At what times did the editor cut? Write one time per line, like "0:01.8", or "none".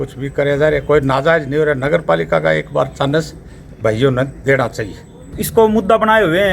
0:05.4